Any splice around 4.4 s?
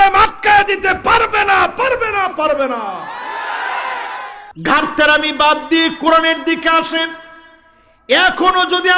yes; 1 cut; at 4.4 s

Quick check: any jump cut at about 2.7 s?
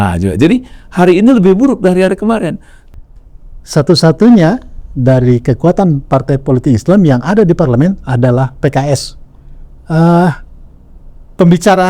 yes; 1 cut; at 2.7 s

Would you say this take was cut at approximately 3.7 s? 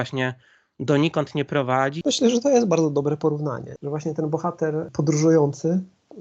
yes; 3 cuts; at 2.0 s, 3.7 s, 4.9 s

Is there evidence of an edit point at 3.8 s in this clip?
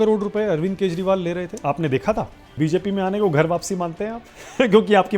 no; 2 cuts; at 1.6 s, 2.4 s

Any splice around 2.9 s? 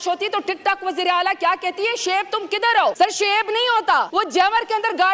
yes; 2 cuts; at 2.9 s, 4.1 s

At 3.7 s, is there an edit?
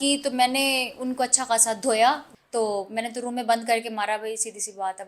no; 1 cut; at 2.3 s

